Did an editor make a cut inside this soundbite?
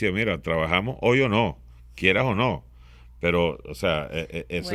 no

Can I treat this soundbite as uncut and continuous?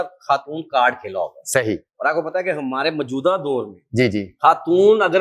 yes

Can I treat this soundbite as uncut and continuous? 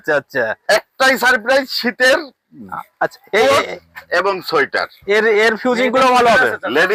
yes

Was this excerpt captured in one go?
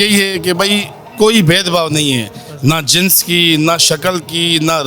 yes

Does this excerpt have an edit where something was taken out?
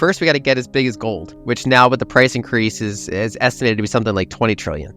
yes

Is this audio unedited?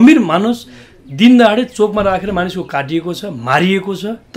yes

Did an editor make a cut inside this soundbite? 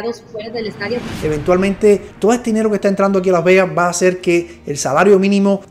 yes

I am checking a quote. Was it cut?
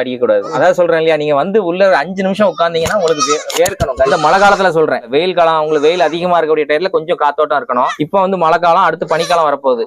yes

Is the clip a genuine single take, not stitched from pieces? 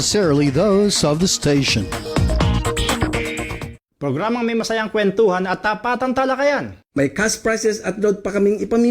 no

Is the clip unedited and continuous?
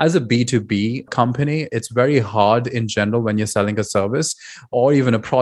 no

